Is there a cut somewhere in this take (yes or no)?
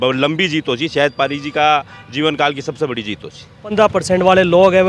yes